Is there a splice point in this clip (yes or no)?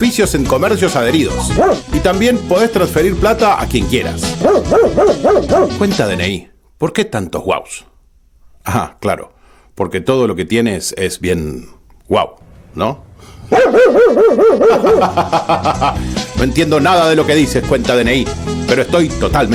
no